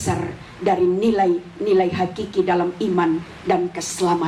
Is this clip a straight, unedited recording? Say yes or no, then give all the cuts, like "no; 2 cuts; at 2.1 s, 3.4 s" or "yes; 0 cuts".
yes; 0 cuts